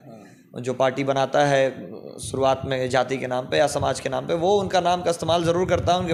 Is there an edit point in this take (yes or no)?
no